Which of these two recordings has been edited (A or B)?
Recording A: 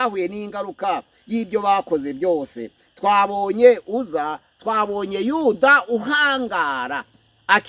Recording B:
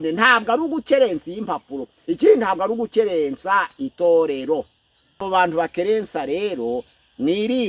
B